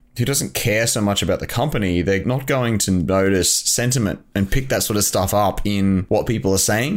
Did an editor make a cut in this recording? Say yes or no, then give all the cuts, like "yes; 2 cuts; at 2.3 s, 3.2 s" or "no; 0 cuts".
yes; 2 cuts; at 2.2 s, 6.0 s